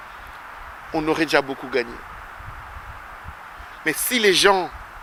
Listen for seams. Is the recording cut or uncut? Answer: uncut